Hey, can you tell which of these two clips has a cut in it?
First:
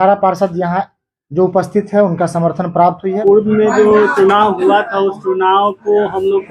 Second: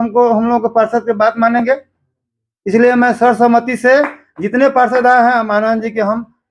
first; 1 cut; at 3.2 s

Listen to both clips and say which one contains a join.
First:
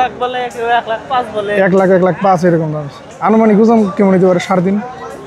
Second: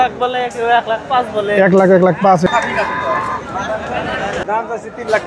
second; 2 cuts; at 2.5 s, 4.4 s

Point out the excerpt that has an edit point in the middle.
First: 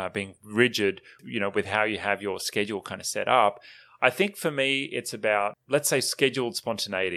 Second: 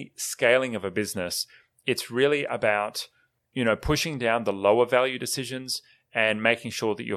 first; 2 cuts; at 1.2 s, 5.6 s

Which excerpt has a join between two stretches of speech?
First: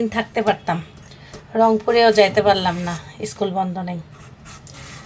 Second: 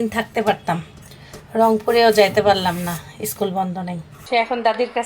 second; 1 cut; at 4.1 s

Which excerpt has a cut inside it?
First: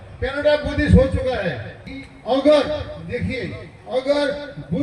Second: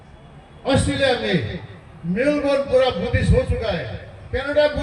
first; 1 cut; at 2.0 s

